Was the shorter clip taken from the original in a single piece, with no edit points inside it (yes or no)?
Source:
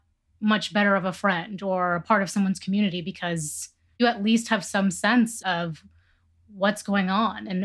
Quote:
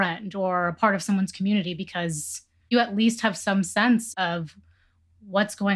yes